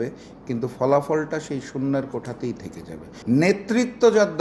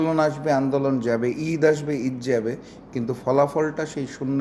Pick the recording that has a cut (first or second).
first